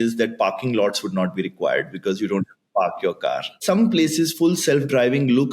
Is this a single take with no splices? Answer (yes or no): no